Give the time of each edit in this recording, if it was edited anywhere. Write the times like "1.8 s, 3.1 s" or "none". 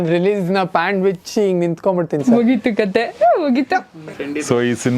3.9 s